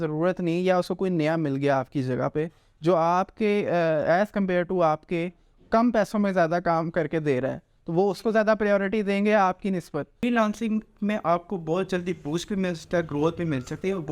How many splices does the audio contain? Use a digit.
1